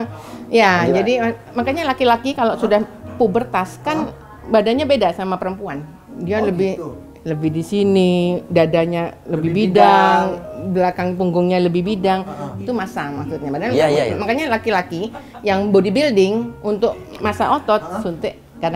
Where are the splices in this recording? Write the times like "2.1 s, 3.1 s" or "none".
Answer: none

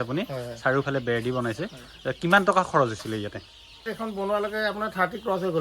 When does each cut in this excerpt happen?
3.9 s

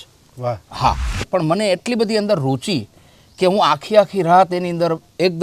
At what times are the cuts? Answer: 1.3 s

